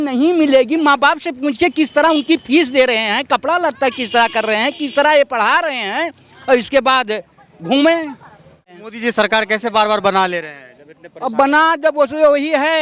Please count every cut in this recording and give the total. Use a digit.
1